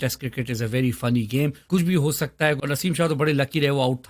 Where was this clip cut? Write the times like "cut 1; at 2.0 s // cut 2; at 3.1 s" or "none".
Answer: cut 1; at 1.6 s // cut 2; at 2.6 s